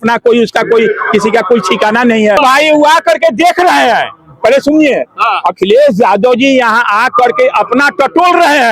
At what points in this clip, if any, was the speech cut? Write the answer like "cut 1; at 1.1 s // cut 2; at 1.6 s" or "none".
cut 1; at 2.4 s